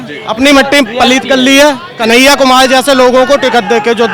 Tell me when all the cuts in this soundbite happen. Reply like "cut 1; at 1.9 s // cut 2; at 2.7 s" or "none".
none